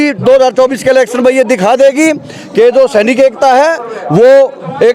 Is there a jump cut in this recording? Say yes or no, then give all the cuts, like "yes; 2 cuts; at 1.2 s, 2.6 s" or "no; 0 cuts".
no; 0 cuts